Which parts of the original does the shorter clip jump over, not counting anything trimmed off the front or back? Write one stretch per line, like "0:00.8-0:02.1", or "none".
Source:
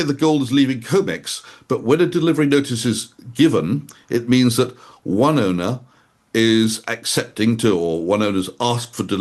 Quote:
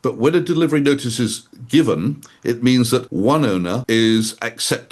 0:04.7-0:05.0
0:05.7-0:06.3